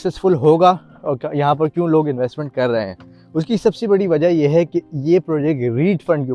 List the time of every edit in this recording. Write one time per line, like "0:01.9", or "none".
none

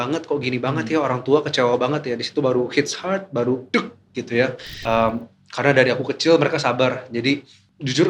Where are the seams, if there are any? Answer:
0:04.7

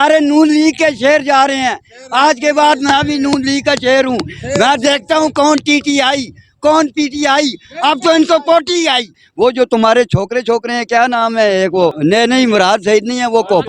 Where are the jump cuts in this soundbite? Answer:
0:09.2
0:12.0

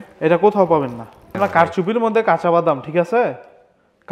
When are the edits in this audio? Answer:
0:01.4

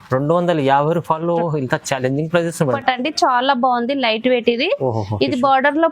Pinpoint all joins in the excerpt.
0:02.8

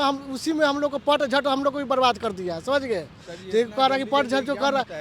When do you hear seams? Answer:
none

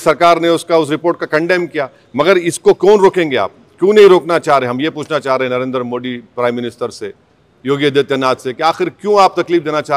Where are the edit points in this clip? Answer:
none

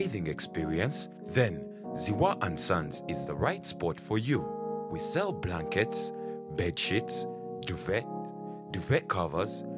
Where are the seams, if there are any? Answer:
none

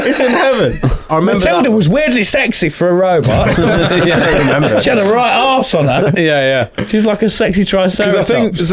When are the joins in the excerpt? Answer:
0:01.1

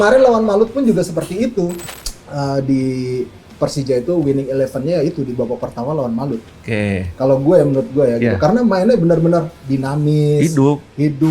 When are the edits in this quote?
0:01.8

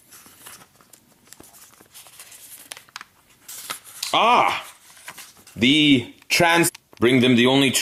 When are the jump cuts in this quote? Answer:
none

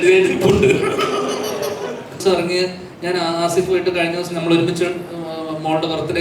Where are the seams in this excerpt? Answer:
0:02.2

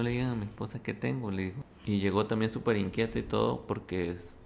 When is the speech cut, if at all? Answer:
0:01.6

